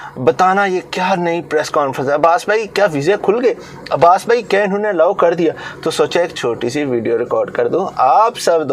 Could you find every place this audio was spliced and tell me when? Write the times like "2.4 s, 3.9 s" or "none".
none

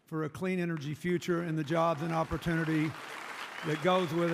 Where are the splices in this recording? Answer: none

